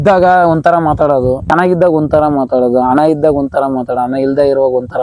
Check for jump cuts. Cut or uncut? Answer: uncut